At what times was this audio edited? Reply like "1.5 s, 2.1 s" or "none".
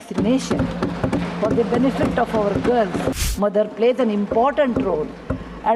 3.2 s